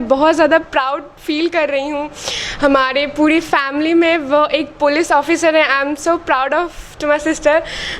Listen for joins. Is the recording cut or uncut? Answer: uncut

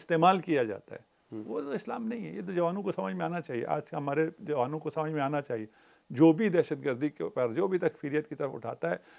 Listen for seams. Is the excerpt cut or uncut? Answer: uncut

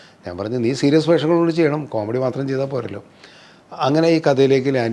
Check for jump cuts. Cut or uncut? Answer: uncut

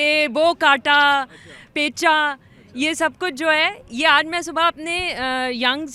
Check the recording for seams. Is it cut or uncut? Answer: uncut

